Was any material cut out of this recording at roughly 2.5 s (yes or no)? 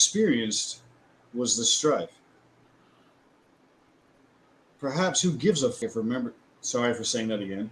no